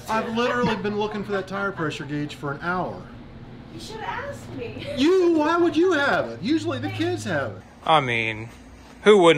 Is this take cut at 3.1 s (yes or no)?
no